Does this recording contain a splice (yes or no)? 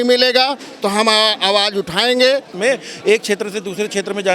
yes